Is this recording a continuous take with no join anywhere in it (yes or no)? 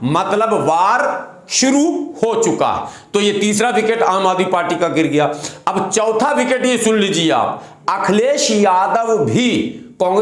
yes